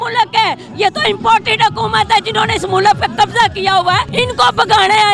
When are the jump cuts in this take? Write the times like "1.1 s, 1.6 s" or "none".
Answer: 4.1 s